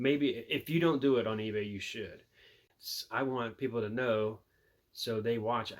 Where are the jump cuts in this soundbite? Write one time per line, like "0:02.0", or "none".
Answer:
0:02.7